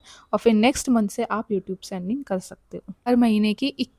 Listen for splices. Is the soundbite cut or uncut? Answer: cut